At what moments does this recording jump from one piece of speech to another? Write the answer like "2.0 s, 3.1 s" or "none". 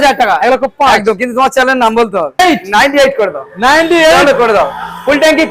2.4 s